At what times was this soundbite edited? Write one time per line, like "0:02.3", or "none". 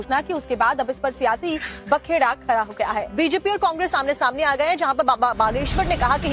0:01.2